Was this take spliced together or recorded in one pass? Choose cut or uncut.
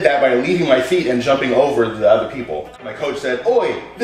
cut